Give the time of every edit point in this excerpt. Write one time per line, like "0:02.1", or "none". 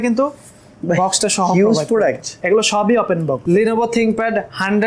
0:02.3
0:03.4